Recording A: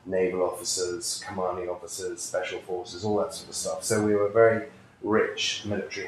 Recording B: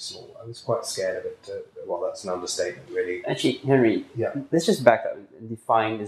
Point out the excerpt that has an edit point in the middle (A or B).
B